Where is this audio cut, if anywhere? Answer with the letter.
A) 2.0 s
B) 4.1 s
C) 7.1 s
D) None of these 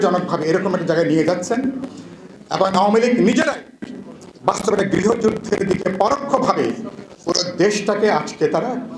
D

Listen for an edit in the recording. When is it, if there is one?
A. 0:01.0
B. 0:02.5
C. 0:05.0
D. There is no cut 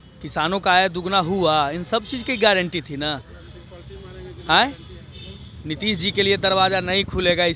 D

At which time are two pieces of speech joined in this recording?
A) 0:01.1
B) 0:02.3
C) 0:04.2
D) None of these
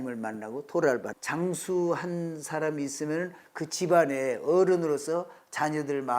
A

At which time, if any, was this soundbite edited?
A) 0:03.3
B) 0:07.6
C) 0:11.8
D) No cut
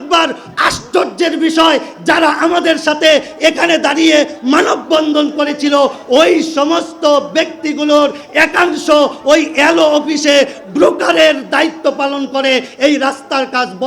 D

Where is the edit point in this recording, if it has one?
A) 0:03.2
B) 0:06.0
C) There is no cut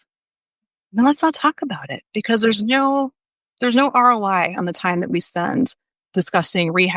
B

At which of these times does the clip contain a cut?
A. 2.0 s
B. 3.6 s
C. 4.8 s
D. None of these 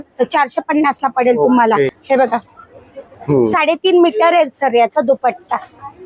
A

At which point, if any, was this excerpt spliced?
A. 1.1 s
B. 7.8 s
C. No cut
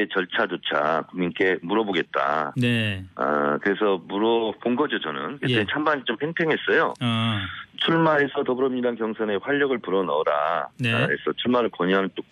C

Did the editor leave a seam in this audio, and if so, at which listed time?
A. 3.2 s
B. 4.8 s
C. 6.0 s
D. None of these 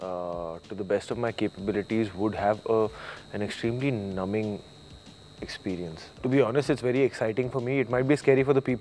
C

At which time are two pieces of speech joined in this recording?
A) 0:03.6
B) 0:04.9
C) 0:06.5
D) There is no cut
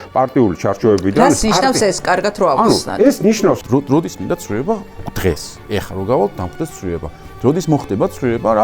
A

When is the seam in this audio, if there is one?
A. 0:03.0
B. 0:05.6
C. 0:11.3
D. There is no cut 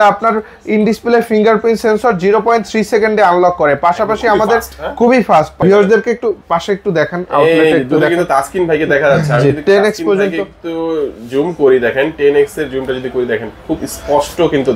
B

